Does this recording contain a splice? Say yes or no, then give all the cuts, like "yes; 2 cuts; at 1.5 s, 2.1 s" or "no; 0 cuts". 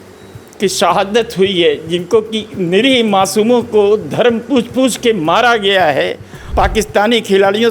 yes; 1 cut; at 6.5 s